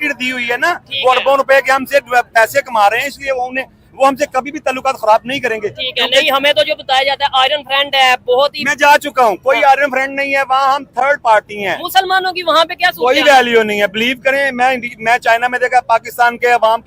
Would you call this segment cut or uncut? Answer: uncut